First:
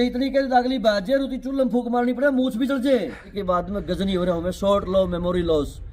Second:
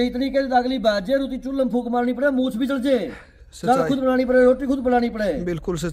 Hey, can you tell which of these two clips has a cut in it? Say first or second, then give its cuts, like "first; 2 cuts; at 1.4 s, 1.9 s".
first; 1 cut; at 3.3 s